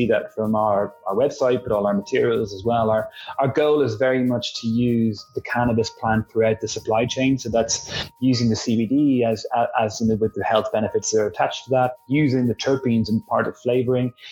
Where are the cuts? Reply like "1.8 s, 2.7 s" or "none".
none